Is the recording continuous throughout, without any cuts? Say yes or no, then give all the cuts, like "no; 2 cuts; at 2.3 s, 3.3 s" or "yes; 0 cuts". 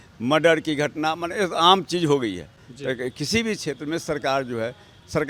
yes; 0 cuts